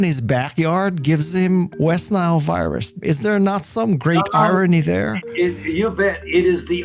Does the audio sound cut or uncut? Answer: cut